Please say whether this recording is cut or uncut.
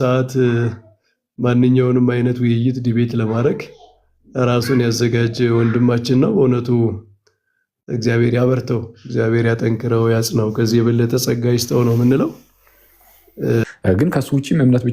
cut